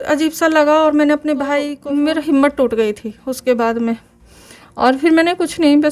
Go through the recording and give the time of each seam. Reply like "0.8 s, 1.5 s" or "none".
1.8 s